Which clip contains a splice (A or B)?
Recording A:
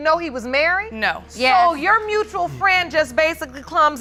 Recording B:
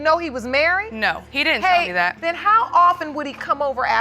B